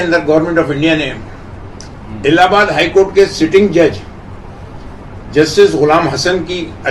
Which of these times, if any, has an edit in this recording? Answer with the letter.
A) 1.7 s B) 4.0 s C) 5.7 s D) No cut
D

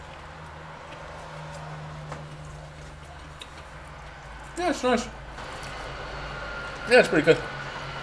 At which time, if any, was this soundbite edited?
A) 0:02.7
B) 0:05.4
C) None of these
B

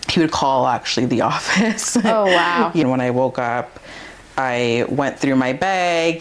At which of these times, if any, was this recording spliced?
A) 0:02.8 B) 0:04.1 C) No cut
A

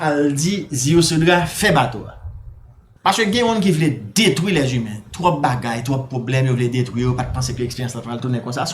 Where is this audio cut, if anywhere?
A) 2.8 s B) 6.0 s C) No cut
A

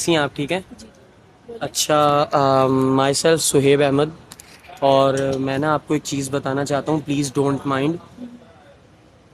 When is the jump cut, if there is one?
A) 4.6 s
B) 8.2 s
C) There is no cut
C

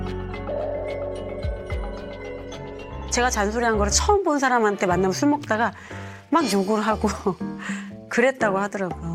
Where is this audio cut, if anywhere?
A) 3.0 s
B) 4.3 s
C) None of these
A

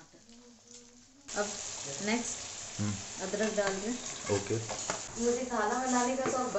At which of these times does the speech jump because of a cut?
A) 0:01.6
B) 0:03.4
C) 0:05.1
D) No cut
C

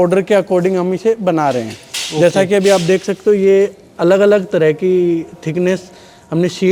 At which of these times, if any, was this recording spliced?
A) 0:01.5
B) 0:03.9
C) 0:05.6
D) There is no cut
D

